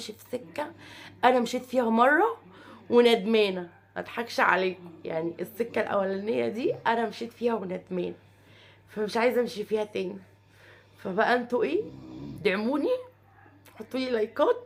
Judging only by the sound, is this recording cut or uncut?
uncut